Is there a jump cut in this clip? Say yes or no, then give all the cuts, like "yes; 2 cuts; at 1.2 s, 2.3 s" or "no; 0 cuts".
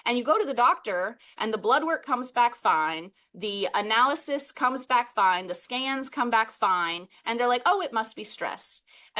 no; 0 cuts